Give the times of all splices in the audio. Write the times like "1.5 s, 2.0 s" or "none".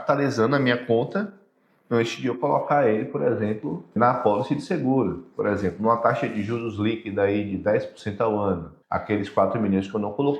4.0 s, 8.7 s